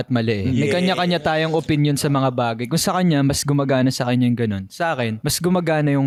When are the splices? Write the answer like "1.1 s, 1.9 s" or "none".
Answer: none